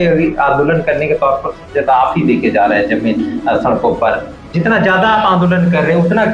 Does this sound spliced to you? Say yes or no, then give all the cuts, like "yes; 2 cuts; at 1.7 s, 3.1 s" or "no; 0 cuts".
no; 0 cuts